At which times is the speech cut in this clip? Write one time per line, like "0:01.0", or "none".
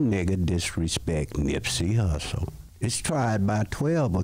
0:02.6